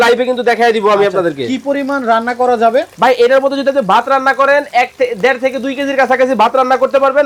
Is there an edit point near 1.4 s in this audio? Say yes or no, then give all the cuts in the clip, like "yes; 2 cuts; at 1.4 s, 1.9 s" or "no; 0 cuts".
no; 0 cuts